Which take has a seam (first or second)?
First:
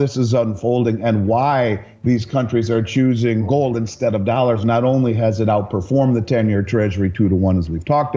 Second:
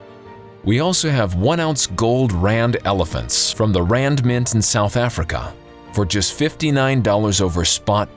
first